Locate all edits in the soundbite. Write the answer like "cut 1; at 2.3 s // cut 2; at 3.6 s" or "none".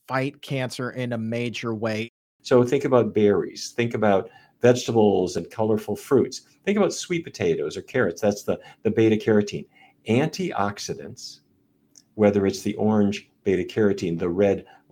cut 1; at 2.1 s